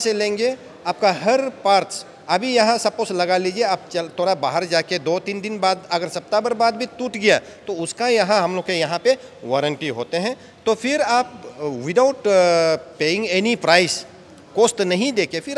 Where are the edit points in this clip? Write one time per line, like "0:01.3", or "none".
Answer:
none